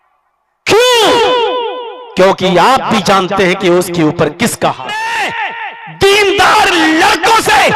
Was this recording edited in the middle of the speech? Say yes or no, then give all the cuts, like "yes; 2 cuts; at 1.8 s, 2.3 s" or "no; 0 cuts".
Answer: yes; 1 cut; at 5.2 s